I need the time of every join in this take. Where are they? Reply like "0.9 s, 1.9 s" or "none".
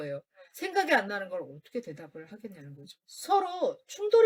none